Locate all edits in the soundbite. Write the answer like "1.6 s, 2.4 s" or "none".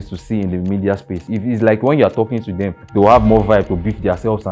1.2 s, 2.7 s